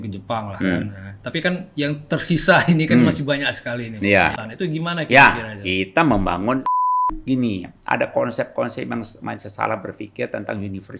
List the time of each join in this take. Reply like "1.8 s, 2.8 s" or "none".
4.4 s, 7.1 s